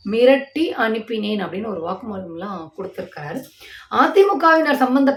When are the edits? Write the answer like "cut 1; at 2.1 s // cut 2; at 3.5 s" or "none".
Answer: none